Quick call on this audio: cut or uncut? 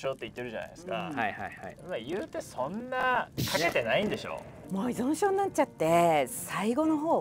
cut